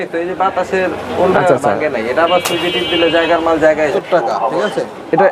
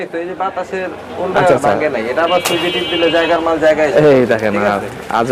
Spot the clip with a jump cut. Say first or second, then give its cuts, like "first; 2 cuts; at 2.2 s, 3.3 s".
first; 1 cut; at 3.9 s